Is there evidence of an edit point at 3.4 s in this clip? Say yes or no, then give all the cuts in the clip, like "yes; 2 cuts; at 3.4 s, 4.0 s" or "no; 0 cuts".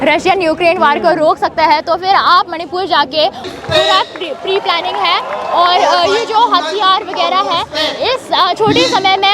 yes; 1 cut; at 3.4 s